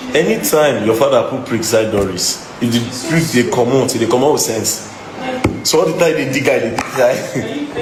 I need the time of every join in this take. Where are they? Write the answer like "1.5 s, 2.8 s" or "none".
none